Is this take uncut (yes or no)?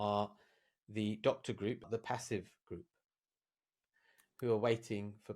no